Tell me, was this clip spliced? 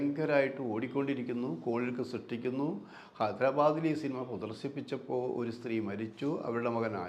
no; 0 cuts

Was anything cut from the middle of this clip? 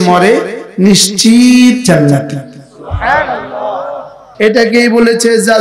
yes; 1 cut; at 4.2 s

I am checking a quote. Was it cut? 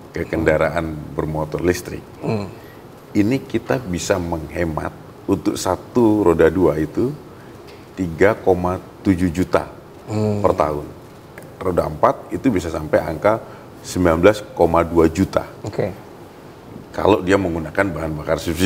yes; 1 cut; at 11.4 s

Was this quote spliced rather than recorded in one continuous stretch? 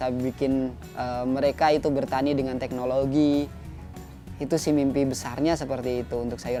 no; 0 cuts

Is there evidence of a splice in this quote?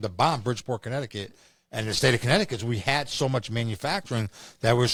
no; 0 cuts

